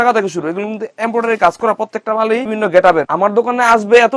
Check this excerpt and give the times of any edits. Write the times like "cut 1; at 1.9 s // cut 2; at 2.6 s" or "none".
cut 1; at 2.5 s // cut 2; at 3.1 s